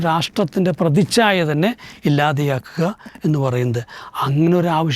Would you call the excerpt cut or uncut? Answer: uncut